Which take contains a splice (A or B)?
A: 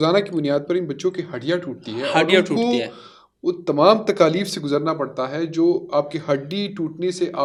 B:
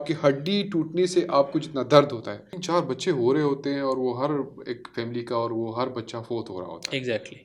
B